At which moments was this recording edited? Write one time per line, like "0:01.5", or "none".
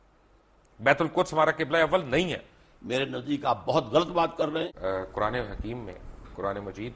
0:04.7